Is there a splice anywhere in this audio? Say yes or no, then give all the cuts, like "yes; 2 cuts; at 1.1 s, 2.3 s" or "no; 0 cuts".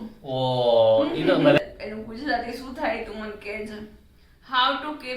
yes; 1 cut; at 1.6 s